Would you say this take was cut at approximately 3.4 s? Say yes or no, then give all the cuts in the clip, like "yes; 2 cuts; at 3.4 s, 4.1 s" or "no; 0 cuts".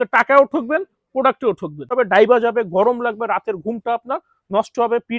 no; 1 cut; at 1.9 s